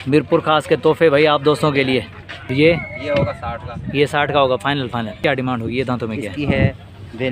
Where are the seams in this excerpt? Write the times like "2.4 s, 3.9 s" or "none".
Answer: 2.5 s, 5.2 s